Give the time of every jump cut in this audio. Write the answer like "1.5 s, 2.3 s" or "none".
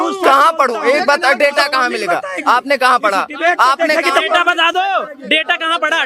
none